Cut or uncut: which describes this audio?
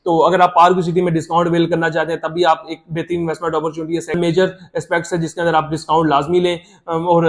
cut